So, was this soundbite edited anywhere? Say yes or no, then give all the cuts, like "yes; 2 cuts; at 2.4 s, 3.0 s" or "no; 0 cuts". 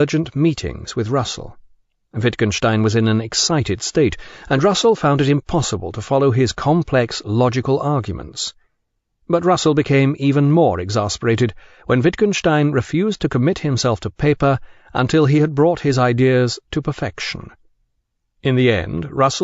yes; 1 cut; at 15.1 s